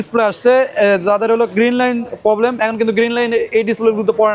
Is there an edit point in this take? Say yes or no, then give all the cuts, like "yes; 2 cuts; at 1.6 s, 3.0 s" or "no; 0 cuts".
no; 0 cuts